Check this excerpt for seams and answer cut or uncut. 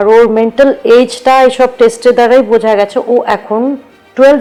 uncut